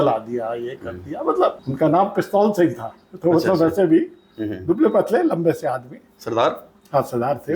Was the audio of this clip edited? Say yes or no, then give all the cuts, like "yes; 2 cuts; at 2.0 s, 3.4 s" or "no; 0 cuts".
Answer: yes; 1 cut; at 1.6 s